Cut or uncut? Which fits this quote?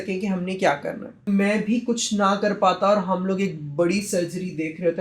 cut